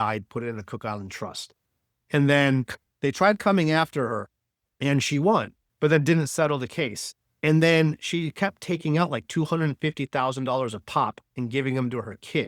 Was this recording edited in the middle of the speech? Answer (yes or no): no